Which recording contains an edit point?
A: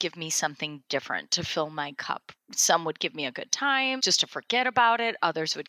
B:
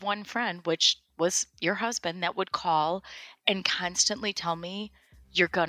A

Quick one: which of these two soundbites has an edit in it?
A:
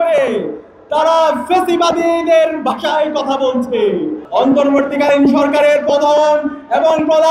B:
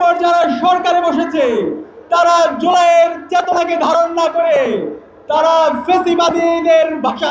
A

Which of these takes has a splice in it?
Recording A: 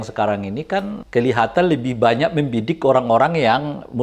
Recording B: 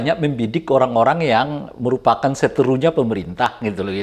A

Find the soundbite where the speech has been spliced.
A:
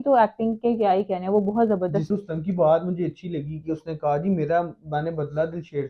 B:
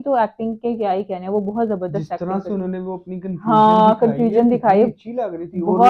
A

